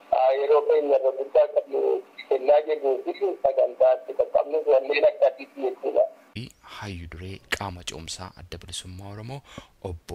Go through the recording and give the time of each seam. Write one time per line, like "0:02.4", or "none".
0:06.4